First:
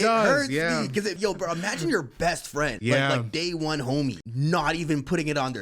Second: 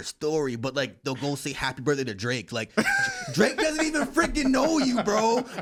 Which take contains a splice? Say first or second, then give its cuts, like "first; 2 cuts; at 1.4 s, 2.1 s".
first; 3 cuts; at 1.2 s, 2.8 s, 4.3 s